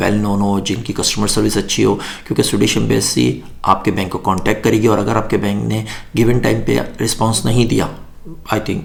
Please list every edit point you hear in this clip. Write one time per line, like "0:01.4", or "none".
none